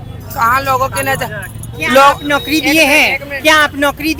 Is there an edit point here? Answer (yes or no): no